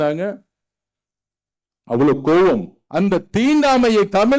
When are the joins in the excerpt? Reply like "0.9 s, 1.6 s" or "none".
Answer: 2.8 s